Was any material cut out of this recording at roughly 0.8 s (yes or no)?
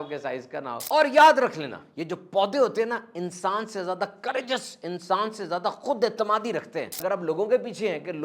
yes